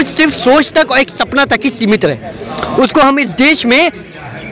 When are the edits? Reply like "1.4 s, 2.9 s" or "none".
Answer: none